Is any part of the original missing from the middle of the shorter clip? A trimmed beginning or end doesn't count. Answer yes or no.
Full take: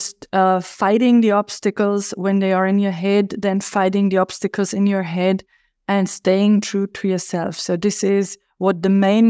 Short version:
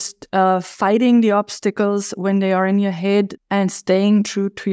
yes